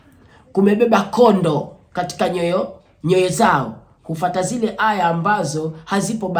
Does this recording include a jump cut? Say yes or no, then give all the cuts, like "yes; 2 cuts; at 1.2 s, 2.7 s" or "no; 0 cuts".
no; 0 cuts